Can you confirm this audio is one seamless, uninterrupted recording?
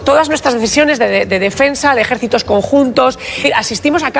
no; 1 cut; at 3.3 s

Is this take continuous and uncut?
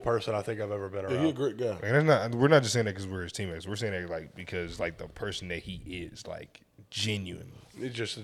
yes; 0 cuts

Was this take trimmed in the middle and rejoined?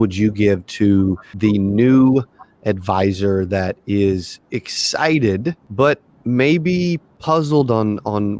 yes; 3 cuts; at 1.3 s, 5.6 s, 7.1 s

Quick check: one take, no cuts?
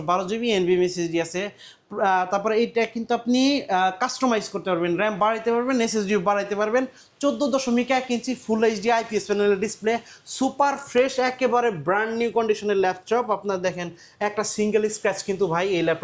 yes; 0 cuts

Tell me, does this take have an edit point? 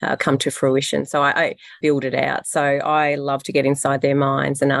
yes; 1 cut; at 1.8 s

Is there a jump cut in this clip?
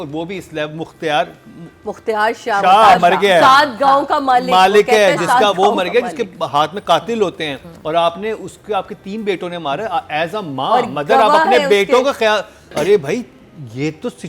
yes; 1 cut; at 12.7 s

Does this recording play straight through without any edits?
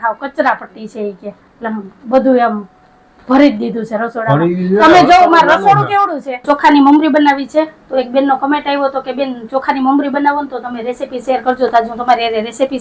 no; 1 cut; at 6.4 s

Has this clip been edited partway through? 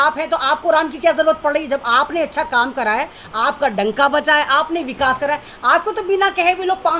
no; 0 cuts

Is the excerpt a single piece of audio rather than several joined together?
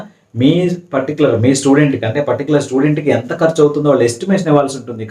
yes; 0 cuts

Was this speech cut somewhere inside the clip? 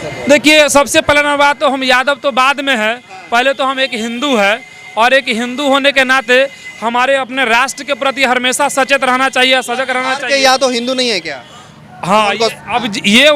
no; 0 cuts

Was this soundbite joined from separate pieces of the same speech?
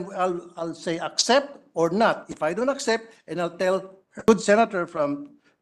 yes; 1 cut; at 4.3 s

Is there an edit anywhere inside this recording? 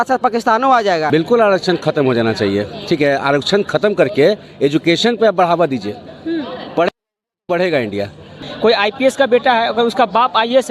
yes; 2 cuts; at 1.1 s, 8.4 s

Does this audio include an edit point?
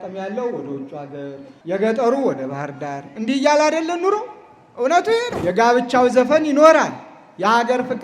yes; 2 cuts; at 1.5 s, 5.3 s

